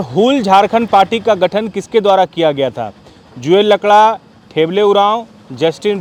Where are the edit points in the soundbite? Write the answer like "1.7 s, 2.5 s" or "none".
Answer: none